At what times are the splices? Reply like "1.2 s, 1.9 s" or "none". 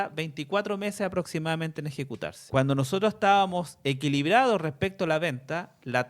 2.4 s